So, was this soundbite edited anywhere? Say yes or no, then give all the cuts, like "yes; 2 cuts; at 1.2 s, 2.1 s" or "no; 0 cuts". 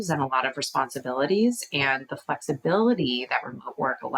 no; 0 cuts